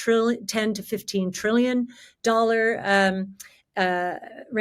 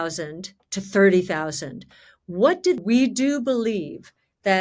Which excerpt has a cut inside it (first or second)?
second